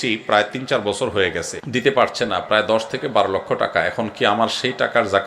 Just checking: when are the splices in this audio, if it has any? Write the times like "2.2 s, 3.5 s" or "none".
1.6 s